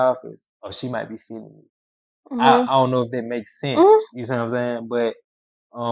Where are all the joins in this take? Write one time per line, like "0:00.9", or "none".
none